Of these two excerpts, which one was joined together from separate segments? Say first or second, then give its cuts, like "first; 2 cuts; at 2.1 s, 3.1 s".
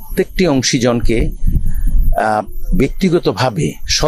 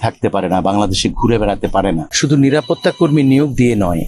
second; 1 cut; at 2.1 s